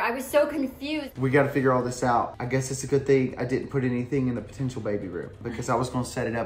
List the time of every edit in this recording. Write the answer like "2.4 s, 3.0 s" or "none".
1.1 s, 2.4 s